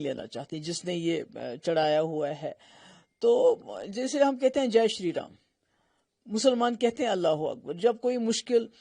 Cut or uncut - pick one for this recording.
uncut